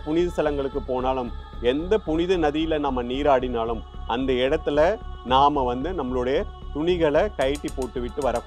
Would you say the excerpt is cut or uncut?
uncut